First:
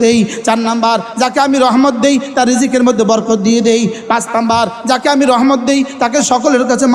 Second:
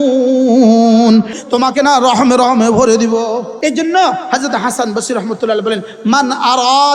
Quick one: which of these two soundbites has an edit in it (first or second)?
second